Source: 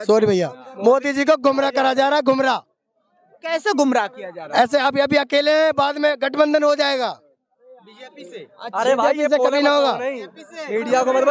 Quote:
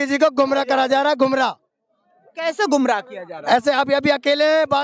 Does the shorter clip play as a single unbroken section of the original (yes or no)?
yes